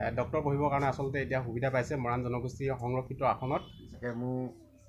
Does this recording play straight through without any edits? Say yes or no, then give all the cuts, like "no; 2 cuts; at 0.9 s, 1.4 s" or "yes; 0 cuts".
no; 1 cut; at 3.9 s